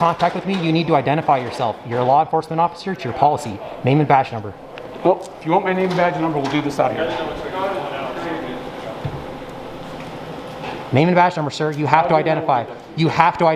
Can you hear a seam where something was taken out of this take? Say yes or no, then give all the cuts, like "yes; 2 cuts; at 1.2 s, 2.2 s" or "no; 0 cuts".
no; 0 cuts